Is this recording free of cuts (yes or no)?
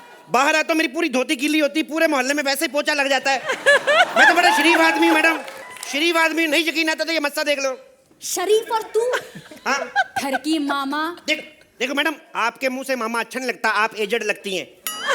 yes